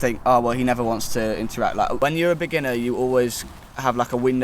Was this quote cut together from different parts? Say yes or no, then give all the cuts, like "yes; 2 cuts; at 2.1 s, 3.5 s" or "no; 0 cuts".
yes; 1 cut; at 1.9 s